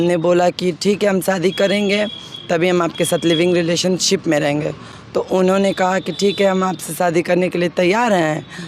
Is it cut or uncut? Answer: uncut